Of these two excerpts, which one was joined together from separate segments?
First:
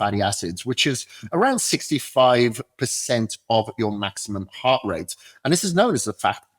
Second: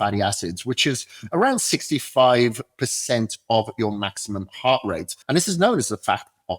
second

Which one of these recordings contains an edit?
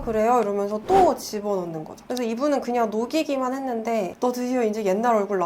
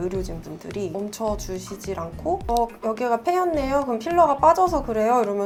first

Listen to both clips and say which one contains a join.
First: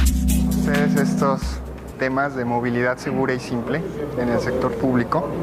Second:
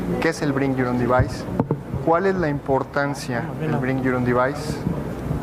second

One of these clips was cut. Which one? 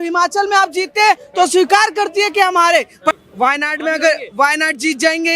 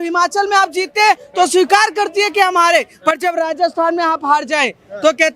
first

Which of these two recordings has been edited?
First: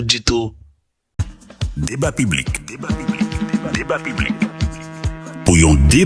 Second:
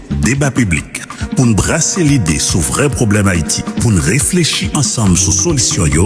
first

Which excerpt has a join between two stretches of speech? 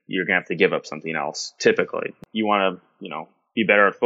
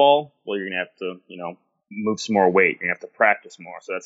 first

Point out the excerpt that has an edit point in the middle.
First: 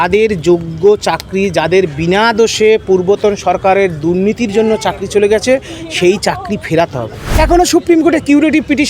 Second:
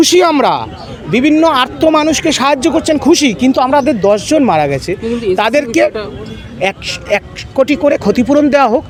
first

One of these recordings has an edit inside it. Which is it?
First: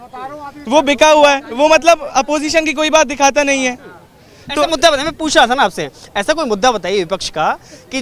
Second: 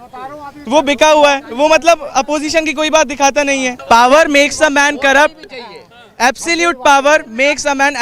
second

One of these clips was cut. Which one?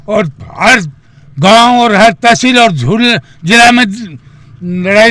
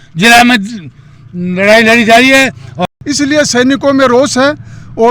second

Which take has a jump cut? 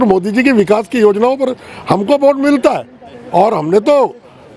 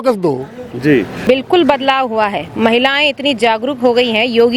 second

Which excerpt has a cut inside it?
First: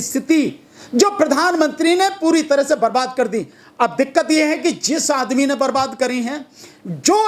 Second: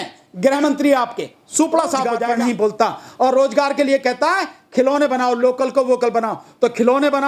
second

